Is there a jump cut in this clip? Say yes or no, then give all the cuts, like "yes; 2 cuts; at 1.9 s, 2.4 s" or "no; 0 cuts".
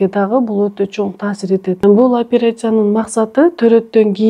yes; 1 cut; at 1.8 s